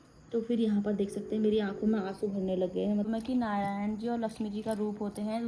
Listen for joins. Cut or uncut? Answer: cut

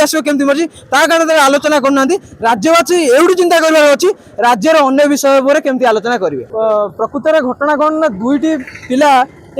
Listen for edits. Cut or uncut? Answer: cut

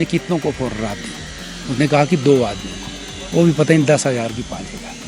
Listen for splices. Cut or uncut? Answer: uncut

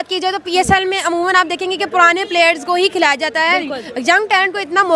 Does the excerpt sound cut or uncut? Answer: uncut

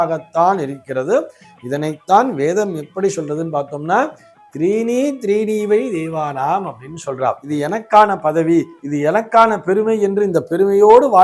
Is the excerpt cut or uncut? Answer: cut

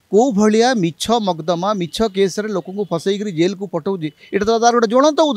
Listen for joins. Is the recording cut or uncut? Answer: uncut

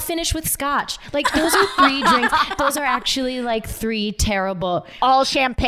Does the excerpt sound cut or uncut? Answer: uncut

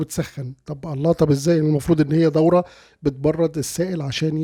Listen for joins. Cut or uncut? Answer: uncut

